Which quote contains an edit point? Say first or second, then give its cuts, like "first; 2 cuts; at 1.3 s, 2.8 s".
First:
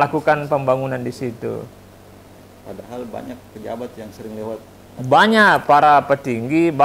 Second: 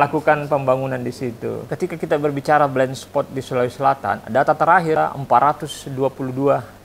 second; 2 cuts; at 1.7 s, 5.0 s